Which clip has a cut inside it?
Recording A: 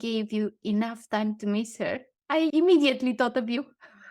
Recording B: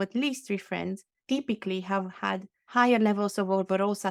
A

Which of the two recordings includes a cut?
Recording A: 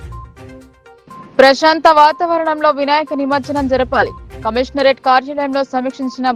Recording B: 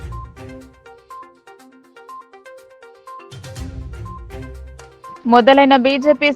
B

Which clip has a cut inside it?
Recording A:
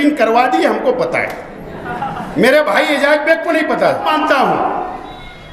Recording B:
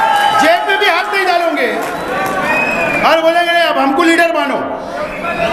A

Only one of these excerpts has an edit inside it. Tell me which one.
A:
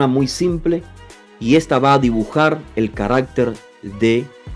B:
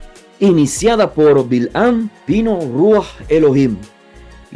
B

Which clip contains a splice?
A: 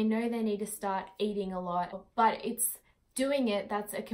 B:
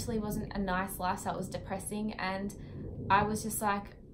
A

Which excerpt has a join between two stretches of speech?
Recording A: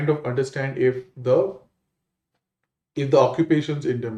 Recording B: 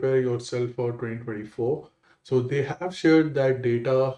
B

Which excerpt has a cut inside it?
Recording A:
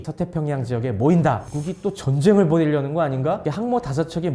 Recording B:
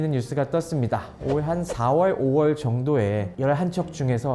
A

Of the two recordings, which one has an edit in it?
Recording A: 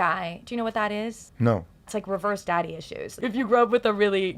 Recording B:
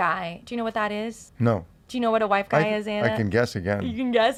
A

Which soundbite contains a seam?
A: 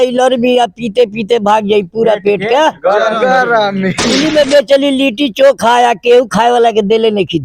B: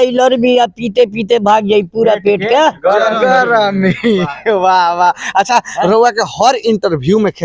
A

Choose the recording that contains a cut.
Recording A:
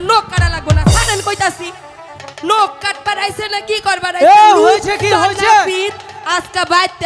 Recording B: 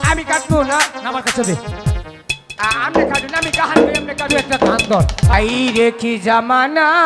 B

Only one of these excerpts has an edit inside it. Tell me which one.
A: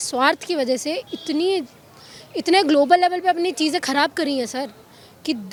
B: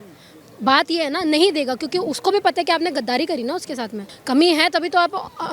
B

